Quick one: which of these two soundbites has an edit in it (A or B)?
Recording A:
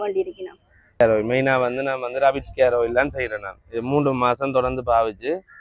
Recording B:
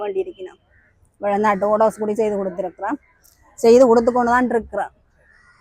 A